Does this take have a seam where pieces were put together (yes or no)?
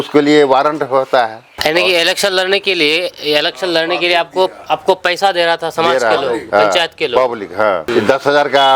yes